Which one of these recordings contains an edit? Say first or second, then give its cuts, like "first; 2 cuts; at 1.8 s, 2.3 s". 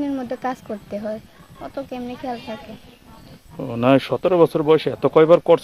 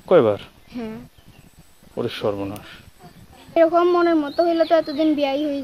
second; 1 cut; at 3.6 s